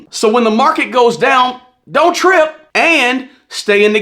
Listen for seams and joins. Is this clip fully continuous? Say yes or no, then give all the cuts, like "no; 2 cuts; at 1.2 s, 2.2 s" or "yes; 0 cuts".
no; 1 cut; at 2.6 s